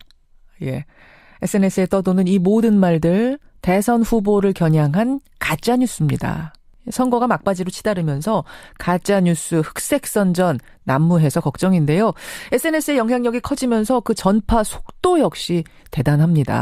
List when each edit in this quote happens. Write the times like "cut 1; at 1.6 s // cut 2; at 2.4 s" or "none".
cut 1; at 15.7 s